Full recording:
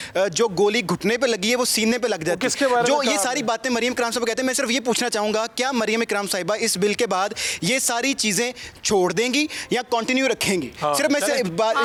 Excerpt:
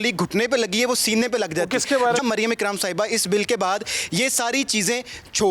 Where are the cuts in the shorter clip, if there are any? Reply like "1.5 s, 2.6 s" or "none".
2.2 s

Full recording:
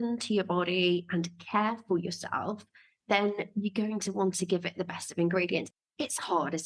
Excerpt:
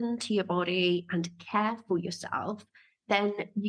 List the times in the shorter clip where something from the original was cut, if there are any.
none

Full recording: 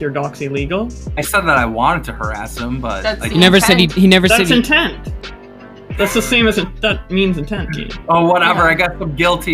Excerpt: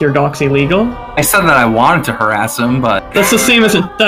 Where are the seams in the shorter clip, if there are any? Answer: 3.0 s

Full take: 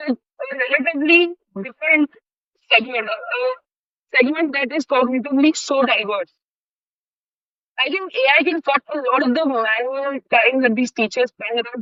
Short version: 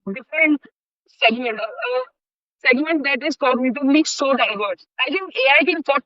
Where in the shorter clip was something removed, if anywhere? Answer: 4.9 s

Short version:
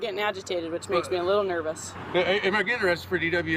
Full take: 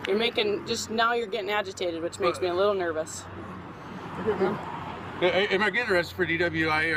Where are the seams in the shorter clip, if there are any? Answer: 1.9 s

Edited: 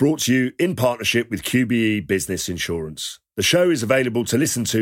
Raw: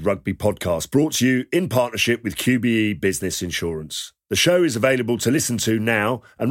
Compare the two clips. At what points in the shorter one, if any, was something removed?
none

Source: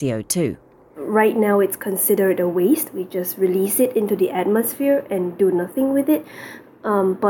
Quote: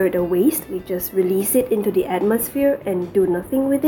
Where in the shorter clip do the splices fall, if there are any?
none

